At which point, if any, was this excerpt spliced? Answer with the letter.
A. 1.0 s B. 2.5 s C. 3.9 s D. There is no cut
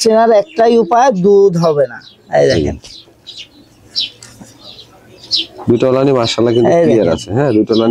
D